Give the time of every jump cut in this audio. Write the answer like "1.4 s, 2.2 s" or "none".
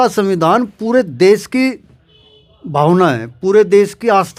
none